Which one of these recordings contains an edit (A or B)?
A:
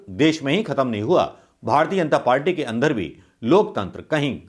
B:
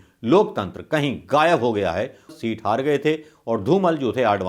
B